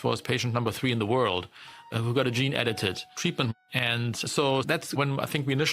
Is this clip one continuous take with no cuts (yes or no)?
no